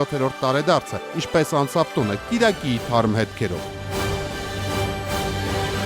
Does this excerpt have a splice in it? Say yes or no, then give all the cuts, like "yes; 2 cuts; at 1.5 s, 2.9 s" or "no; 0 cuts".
yes; 1 cut; at 3.7 s